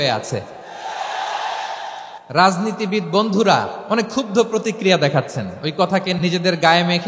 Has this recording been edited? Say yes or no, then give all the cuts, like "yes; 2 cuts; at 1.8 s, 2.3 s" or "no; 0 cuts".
yes; 3 cuts; at 2.1 s, 3.8 s, 6.1 s